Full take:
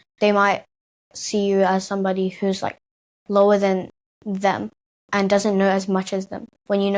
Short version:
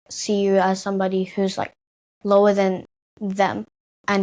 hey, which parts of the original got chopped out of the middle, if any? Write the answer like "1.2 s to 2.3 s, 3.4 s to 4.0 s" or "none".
none

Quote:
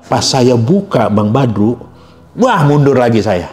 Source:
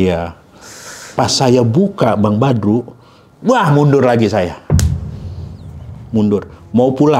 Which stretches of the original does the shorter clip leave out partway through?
none

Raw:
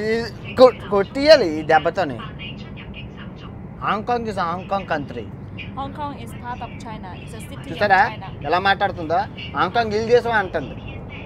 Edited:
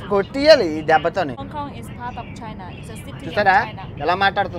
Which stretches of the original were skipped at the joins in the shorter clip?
2.2 s to 5.8 s

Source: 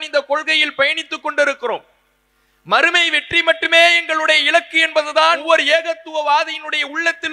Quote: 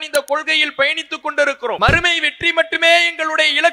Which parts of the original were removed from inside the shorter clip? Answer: 1.8 s to 2.7 s

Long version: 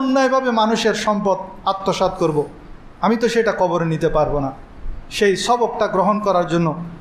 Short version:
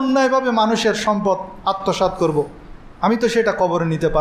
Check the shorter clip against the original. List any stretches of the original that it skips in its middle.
none

